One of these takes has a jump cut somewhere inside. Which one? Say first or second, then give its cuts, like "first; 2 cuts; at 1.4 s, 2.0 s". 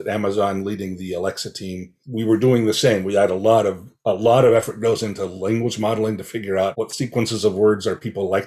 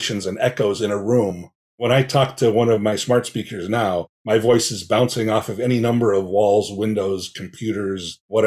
first; 1 cut; at 1.9 s